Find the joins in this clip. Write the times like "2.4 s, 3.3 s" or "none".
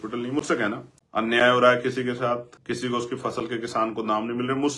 0.9 s, 2.5 s